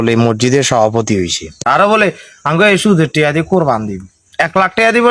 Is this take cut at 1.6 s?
no; 0 cuts

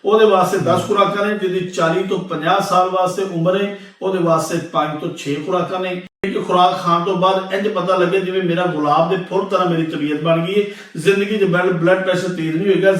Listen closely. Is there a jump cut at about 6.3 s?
yes; 1 cut; at 6.3 s

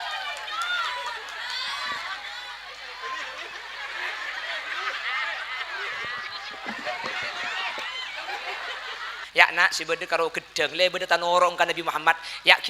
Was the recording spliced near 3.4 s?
no; 1 cut; at 9.2 s

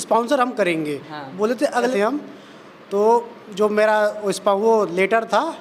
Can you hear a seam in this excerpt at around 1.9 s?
yes; 1 cut; at 1.9 s

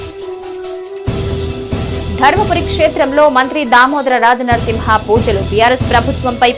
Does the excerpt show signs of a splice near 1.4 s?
yes; 1 cut; at 1.4 s

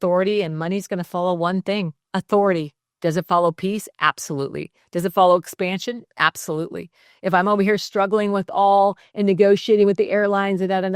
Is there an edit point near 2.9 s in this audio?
yes; 2 cuts; at 2.0 s, 2.9 s

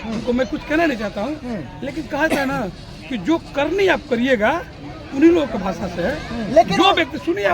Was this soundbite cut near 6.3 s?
yes; 1 cut; at 6.3 s

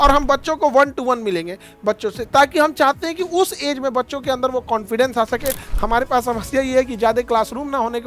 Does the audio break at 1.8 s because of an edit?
no; 1 cut; at 5.7 s

